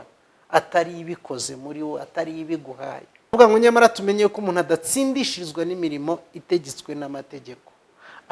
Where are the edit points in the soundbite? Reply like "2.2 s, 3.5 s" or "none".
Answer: 3.3 s